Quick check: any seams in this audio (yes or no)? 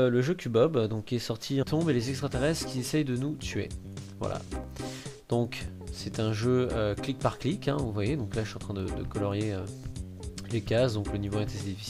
no